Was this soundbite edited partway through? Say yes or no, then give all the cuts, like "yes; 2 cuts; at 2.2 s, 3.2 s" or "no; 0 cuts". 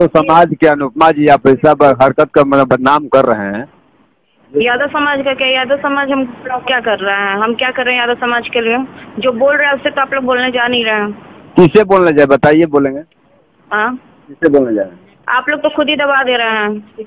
no; 0 cuts